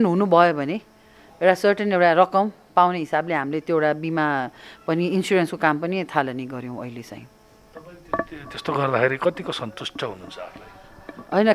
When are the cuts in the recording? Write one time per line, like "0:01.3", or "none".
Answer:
none